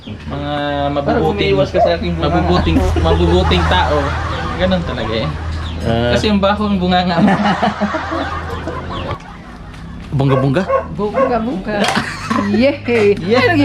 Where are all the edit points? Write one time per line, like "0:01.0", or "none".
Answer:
0:09.3